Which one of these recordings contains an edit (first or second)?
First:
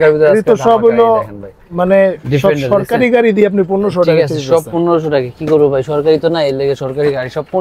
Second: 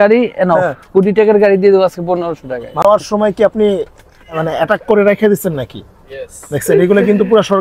second